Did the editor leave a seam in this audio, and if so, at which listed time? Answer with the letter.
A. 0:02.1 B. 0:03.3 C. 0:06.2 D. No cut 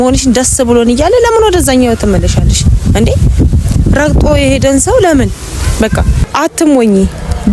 C